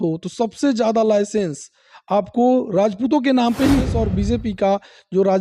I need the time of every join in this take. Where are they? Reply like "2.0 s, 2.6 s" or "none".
4.0 s